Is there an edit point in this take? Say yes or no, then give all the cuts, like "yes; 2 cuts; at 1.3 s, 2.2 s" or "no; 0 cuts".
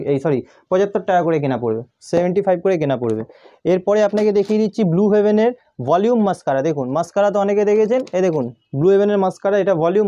no; 0 cuts